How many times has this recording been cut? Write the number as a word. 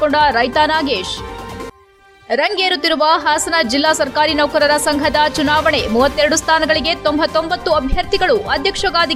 zero